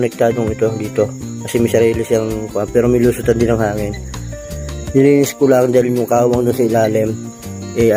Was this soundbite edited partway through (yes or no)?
no